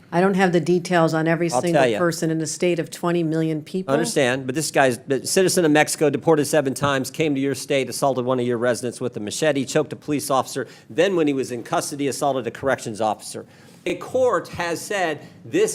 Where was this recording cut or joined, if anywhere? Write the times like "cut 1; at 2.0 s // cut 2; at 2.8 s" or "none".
cut 1; at 13.9 s